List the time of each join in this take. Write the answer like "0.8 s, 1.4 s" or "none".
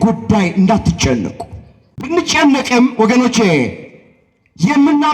2.1 s